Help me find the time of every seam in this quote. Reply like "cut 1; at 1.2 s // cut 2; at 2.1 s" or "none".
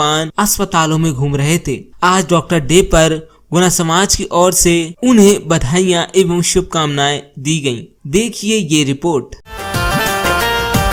none